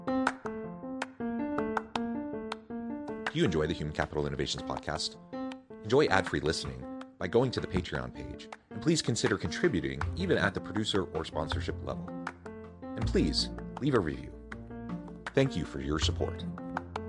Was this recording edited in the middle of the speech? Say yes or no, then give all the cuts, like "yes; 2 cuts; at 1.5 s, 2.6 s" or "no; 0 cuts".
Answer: no; 0 cuts